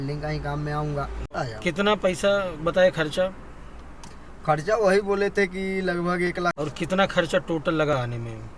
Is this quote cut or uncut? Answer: cut